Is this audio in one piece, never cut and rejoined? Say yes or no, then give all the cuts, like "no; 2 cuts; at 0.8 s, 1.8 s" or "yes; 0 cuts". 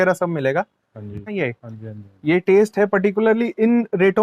no; 1 cut; at 1.3 s